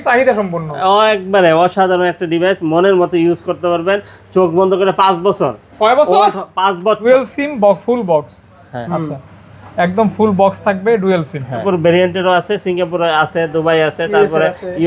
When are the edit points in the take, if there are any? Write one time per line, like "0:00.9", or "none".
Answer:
0:07.0
0:11.6